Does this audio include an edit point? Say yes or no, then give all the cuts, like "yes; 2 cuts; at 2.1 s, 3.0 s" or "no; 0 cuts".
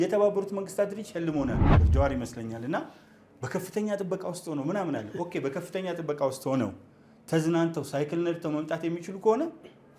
yes; 1 cut; at 1.8 s